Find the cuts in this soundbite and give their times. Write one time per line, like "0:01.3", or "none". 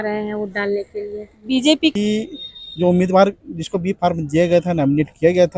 0:01.9